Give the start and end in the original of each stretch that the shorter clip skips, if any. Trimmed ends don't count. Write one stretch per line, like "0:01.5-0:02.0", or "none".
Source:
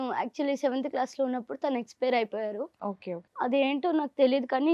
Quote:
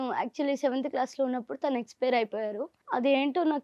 0:02.7-0:03.2